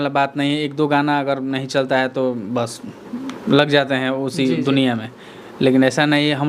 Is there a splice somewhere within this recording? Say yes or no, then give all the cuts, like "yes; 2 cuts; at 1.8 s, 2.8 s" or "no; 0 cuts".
no; 0 cuts